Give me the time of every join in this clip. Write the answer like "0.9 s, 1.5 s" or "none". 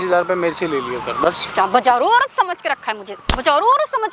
none